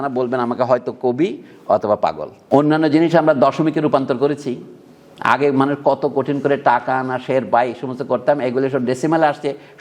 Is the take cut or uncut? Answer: cut